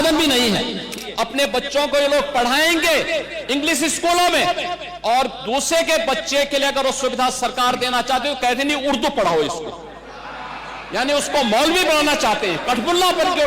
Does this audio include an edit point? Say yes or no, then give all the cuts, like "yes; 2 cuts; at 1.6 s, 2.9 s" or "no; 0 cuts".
yes; 1 cut; at 0.9 s